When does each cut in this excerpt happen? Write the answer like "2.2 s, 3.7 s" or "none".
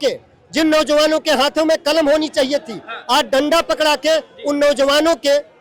none